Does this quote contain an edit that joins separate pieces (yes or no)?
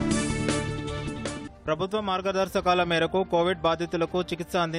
no